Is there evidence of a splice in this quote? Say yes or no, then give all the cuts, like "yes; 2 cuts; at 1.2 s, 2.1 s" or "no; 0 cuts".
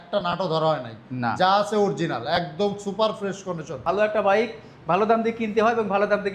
yes; 1 cut; at 3.8 s